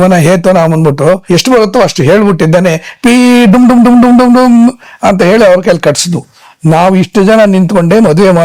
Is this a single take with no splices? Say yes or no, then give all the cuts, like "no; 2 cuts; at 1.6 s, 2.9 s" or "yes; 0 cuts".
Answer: no; 1 cut; at 1.2 s